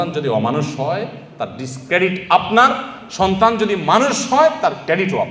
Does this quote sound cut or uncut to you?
uncut